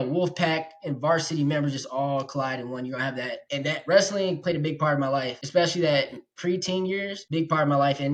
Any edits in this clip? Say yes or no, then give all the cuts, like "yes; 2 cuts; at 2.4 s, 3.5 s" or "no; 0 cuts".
yes; 1 cut; at 3.4 s